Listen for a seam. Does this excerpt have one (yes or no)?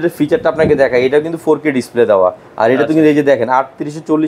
no